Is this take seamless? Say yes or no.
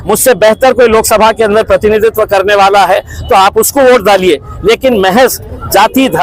yes